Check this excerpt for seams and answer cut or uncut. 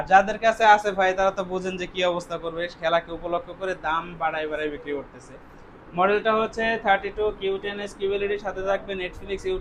uncut